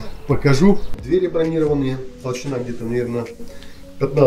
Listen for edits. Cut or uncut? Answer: cut